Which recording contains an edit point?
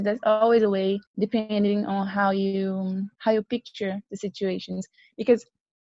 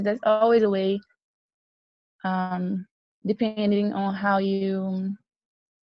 first; 2 cuts; at 1.1 s, 3.1 s

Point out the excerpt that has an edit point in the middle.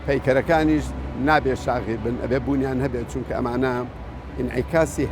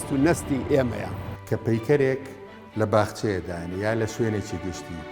second; 1 cut; at 1.3 s

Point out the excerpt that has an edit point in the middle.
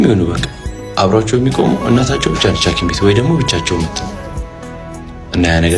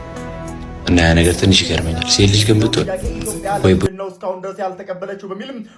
second; 1 cut; at 3.9 s

